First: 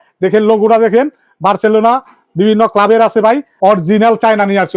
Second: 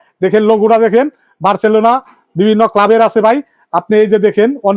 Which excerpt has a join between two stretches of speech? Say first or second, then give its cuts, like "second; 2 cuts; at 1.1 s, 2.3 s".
first; 1 cut; at 3.5 s